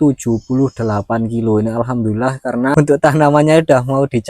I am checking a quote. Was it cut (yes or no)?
yes